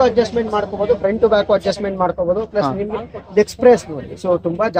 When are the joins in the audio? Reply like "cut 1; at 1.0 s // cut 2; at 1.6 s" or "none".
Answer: none